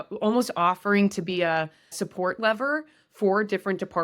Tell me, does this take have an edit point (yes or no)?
yes